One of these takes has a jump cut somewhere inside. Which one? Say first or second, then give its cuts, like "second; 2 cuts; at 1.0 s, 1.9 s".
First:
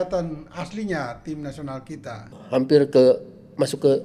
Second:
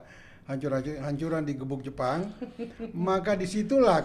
first; 1 cut; at 2.3 s